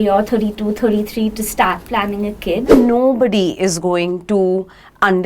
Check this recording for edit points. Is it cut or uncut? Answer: cut